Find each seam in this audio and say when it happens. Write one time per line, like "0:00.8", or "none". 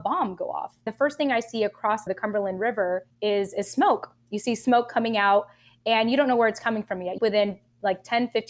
0:00.9
0:07.2

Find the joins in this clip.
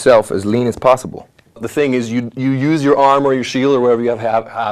0:01.6

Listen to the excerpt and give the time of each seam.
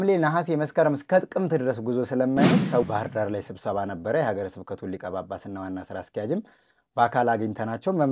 0:02.8

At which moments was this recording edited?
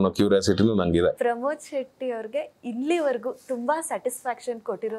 0:01.2

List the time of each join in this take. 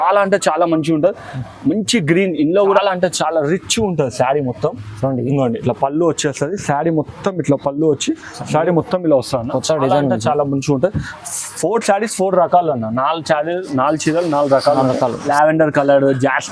0:02.8
0:15.3

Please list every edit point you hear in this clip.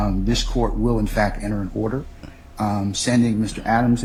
none

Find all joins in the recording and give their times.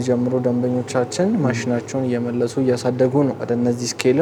none

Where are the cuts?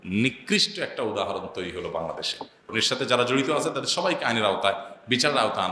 0:02.6

